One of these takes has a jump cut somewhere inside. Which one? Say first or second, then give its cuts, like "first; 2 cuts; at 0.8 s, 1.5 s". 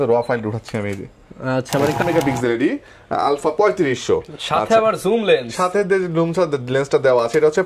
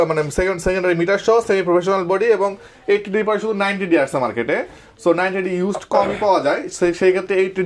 first; 1 cut; at 2.0 s